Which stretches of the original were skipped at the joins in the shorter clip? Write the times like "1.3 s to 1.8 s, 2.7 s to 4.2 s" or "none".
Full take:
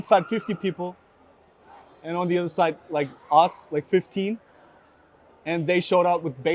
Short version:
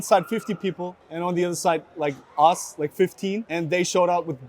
1.0 s to 1.9 s, 4.4 s to 5.4 s